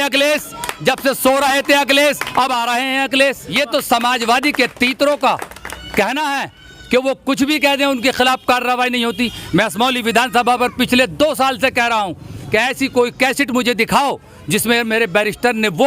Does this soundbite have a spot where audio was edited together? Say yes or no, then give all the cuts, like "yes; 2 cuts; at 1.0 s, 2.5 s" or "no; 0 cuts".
yes; 1 cut; at 3.4 s